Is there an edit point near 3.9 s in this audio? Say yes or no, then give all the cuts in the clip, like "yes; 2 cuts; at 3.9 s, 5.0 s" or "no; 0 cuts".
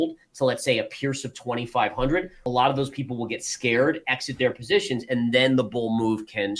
no; 1 cut; at 2.4 s